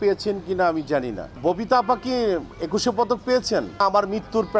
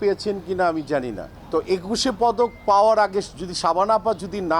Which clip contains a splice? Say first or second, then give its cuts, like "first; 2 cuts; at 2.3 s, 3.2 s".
first; 2 cuts; at 1.4 s, 3.8 s